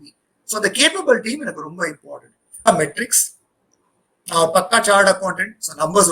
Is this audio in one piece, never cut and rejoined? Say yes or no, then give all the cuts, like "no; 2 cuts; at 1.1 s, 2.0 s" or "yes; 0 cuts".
no; 1 cut; at 2.7 s